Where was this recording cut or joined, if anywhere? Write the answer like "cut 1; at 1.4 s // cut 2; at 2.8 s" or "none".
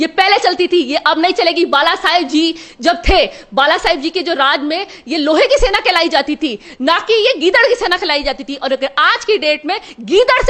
none

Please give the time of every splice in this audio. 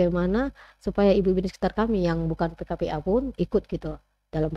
none

